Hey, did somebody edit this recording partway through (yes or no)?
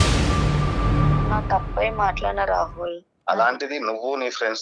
no